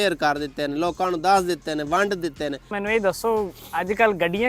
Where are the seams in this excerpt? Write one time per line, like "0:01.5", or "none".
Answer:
0:02.8